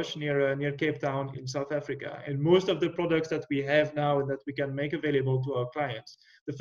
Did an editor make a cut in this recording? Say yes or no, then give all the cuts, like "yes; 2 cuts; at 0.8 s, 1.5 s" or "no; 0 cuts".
yes; 1 cut; at 1.3 s